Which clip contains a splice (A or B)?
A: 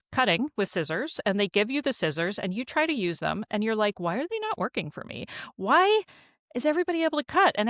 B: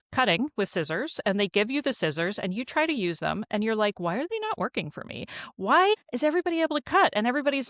B